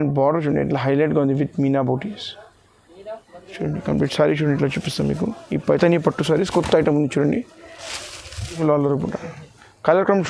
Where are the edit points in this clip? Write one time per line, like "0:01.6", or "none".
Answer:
0:08.6